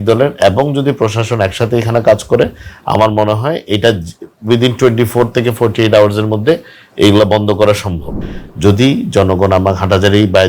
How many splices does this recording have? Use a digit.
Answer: 1